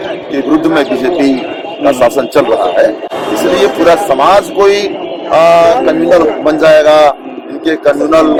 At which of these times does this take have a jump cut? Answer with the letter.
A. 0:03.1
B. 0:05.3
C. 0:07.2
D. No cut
D